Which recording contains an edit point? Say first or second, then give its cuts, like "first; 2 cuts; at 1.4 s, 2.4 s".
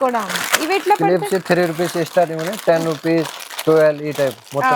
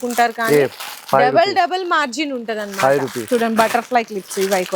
second; 1 cut; at 3.2 s